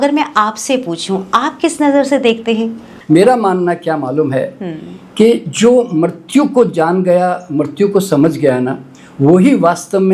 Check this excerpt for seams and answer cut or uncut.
cut